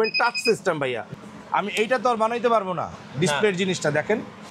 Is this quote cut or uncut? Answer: cut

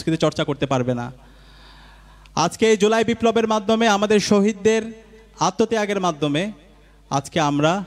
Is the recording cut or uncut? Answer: uncut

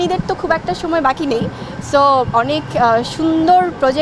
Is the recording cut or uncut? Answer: uncut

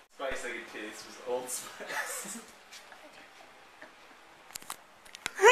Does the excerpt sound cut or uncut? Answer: uncut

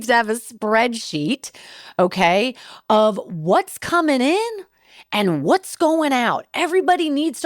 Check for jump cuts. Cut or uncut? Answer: uncut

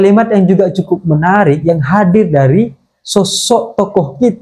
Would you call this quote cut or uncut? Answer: uncut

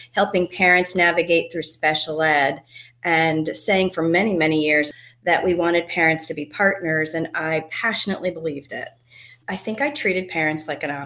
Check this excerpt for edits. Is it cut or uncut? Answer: cut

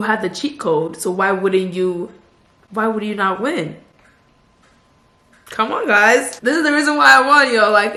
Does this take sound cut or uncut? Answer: uncut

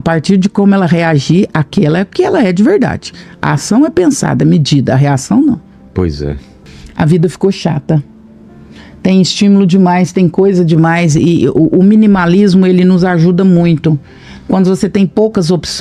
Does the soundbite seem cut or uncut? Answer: uncut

